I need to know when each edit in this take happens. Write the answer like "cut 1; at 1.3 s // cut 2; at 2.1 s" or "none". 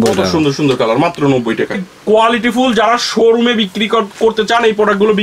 cut 1; at 1.9 s